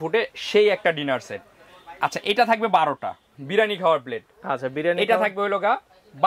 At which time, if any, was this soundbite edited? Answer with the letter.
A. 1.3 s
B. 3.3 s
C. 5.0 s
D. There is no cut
B